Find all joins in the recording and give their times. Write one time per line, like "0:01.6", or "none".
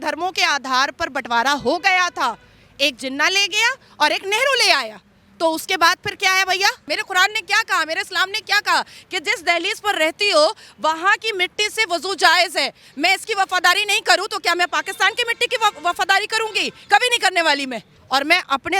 0:06.9
0:17.9